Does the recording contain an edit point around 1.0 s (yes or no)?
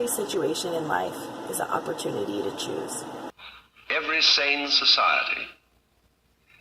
no